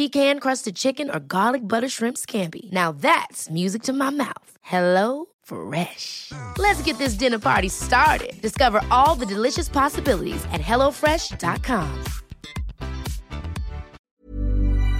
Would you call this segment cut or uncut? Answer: cut